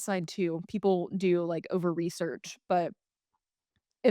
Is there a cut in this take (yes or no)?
no